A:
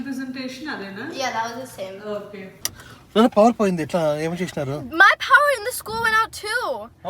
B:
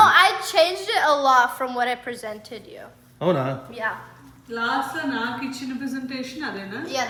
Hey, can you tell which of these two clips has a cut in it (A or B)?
A